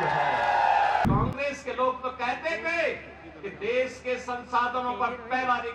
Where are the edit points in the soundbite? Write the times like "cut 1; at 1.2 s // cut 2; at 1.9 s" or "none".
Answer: cut 1; at 1.0 s